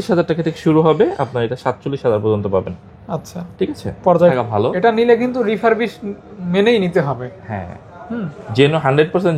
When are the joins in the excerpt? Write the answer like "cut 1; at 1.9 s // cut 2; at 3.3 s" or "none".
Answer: cut 1; at 4.3 s

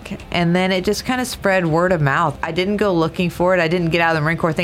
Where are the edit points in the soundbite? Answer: cut 1; at 2.3 s

